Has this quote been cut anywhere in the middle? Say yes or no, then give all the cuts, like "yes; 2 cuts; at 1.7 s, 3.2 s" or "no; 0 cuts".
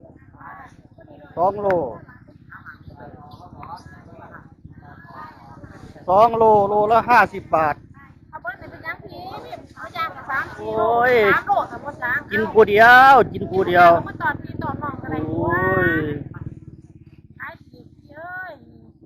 no; 0 cuts